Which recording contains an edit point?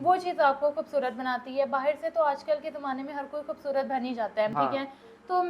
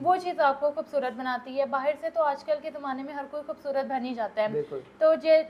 first; 1 cut; at 4.5 s

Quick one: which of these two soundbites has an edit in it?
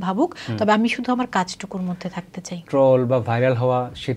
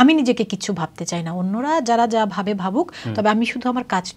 first; 1 cut; at 2.6 s

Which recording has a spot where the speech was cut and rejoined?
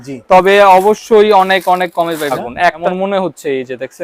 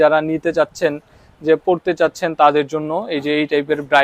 first; 1 cut; at 2.5 s

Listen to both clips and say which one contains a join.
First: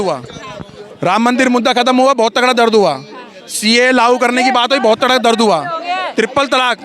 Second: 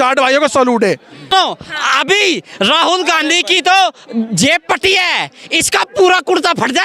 second; 1 cut; at 1.2 s

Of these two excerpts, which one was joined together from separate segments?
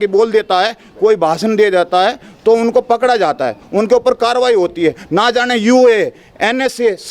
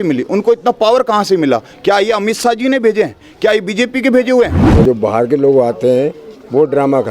second; 1 cut; at 4.6 s

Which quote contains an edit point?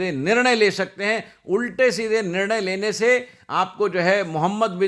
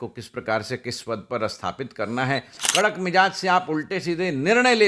second; 1 cut; at 2.6 s

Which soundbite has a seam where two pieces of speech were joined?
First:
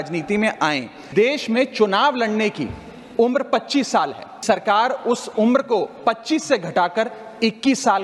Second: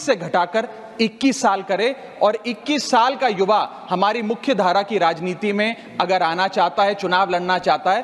first; 2 cuts; at 1.1 s, 4.4 s

